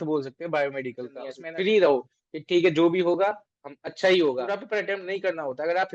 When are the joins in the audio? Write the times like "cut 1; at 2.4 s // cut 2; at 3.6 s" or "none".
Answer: cut 1; at 1.3 s // cut 2; at 4.5 s